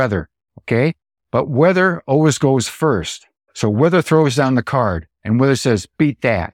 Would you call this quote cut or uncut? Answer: cut